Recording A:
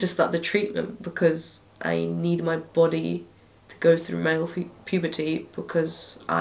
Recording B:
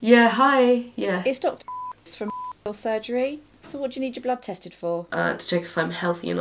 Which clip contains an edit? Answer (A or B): B